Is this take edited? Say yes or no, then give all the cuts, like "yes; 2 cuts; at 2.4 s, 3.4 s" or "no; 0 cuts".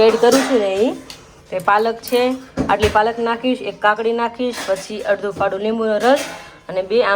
no; 0 cuts